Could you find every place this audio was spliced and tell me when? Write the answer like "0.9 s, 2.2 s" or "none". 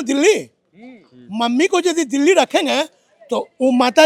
none